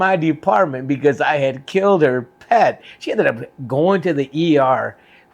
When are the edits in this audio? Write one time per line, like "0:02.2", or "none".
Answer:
0:02.9